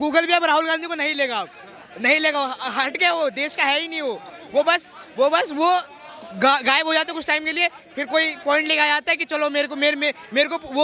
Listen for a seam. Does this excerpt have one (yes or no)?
no